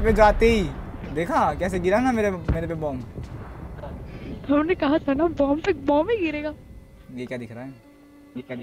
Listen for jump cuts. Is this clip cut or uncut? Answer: uncut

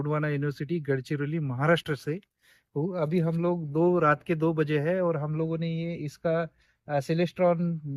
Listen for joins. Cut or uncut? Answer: uncut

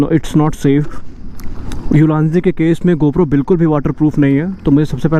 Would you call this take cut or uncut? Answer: uncut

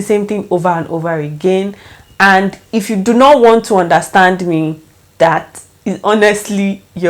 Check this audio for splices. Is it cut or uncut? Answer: uncut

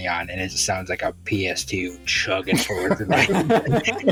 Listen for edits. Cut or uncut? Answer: uncut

